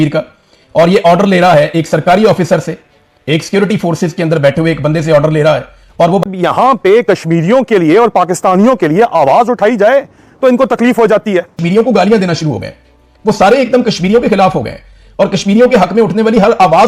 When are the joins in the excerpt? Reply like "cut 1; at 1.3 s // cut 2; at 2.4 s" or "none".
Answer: cut 1; at 6.2 s // cut 2; at 11.5 s

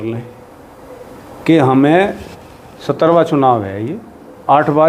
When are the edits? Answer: none

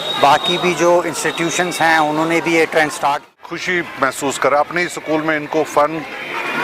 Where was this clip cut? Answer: cut 1; at 3.5 s

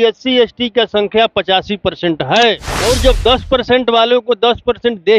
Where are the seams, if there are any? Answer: cut 1; at 2.7 s

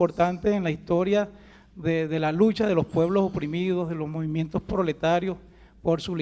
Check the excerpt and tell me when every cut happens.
cut 1; at 4.4 s

